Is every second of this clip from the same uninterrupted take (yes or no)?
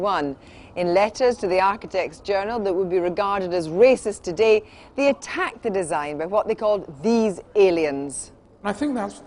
no